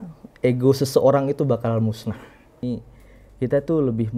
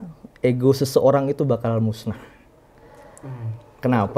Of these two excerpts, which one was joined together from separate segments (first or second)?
first